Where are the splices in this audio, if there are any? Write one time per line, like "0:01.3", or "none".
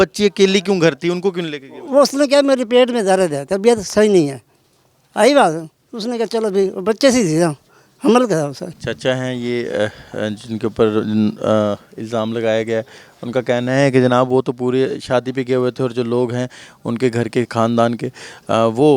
none